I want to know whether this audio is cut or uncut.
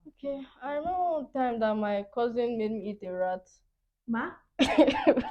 cut